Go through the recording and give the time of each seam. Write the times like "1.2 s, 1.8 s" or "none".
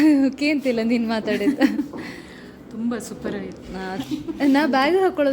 4.0 s